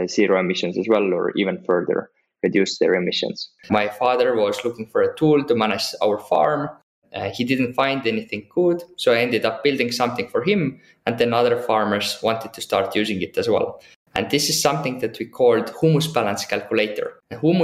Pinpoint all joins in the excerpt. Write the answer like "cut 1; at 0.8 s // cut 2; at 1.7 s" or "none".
cut 1; at 3.5 s // cut 2; at 14.0 s